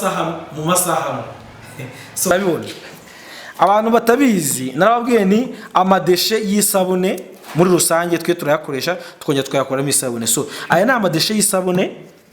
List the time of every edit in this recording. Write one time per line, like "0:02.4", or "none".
0:02.3